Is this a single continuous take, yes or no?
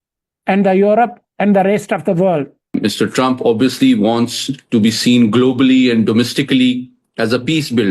no